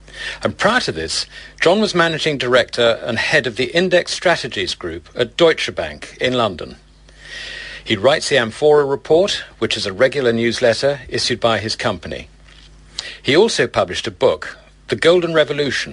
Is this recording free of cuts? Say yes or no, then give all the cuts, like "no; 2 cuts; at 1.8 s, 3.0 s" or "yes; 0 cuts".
no; 1 cut; at 11.2 s